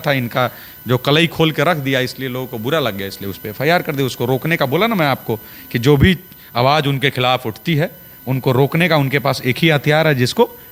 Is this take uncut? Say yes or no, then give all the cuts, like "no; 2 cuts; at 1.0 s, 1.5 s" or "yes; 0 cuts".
yes; 0 cuts